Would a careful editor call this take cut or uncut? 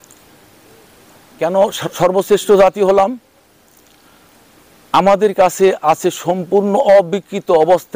cut